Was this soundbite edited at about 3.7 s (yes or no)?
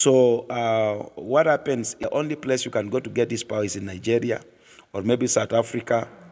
no